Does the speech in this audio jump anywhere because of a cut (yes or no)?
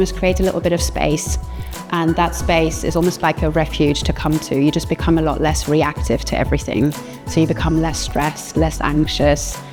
no